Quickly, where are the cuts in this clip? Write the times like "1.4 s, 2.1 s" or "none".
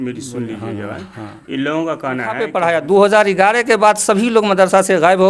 2.6 s